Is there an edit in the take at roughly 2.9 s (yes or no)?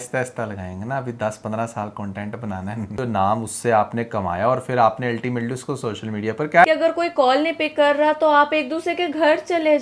yes